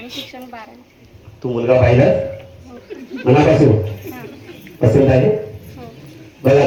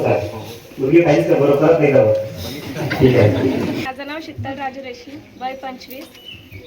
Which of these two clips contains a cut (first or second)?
second